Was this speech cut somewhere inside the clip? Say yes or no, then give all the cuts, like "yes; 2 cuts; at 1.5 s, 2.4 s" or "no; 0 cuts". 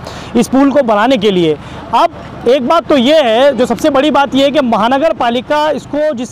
no; 0 cuts